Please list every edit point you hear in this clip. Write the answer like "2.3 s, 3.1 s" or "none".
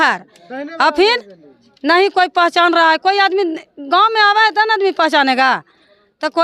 none